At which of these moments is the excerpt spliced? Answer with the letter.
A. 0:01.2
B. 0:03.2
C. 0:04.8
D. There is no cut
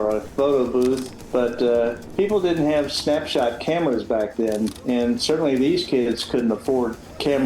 A